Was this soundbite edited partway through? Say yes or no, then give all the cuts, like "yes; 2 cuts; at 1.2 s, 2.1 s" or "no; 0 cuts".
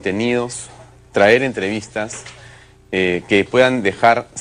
no; 0 cuts